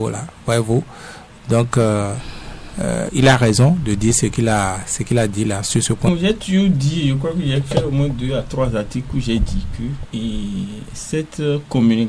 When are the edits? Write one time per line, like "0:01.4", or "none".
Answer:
0:06.1